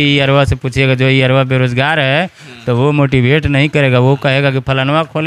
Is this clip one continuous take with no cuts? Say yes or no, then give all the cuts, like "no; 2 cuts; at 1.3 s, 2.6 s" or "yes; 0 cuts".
yes; 0 cuts